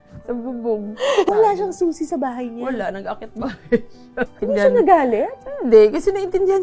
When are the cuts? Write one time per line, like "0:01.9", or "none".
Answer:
0:01.3
0:04.3